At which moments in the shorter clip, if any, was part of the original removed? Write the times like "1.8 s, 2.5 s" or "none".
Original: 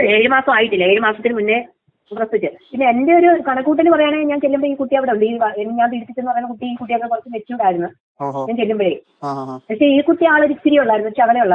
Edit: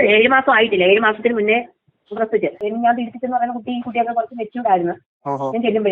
2.6 s